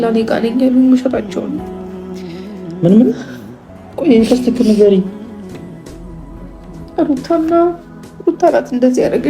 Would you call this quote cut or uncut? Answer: cut